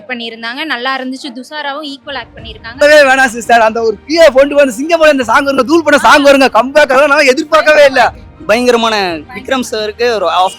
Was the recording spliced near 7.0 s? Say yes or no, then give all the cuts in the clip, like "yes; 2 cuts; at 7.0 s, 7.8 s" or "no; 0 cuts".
no; 2 cuts; at 2.7 s, 8.3 s